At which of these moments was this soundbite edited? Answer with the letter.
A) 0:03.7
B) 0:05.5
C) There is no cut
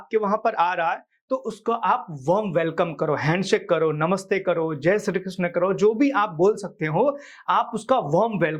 C